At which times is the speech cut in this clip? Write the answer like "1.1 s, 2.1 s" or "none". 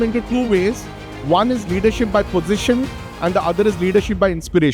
none